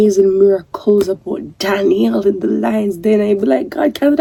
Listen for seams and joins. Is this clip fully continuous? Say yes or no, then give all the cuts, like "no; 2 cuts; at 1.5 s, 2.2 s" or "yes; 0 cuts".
yes; 0 cuts